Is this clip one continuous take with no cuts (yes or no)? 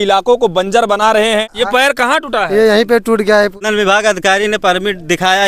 no